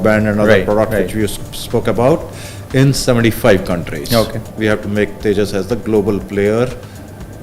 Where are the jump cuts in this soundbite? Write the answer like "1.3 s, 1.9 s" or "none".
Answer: 4.5 s